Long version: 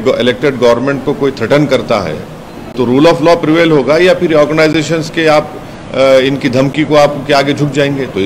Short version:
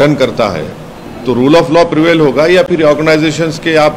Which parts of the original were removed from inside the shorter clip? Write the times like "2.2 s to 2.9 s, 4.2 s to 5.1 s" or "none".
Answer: none